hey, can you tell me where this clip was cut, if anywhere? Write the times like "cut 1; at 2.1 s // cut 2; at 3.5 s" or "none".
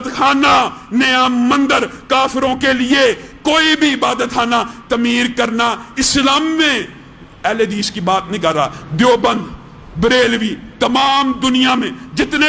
none